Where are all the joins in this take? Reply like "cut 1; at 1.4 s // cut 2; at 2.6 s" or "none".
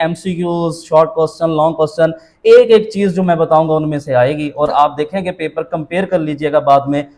none